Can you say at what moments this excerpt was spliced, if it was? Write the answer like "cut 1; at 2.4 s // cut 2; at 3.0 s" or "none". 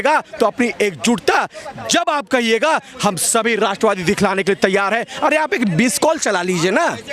none